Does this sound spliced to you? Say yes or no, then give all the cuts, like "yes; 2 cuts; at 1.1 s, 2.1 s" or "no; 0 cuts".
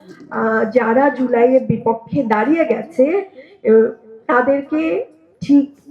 no; 0 cuts